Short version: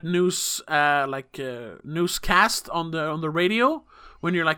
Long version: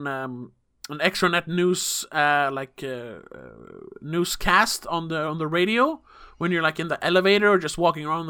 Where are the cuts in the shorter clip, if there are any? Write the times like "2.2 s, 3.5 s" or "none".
1.7 s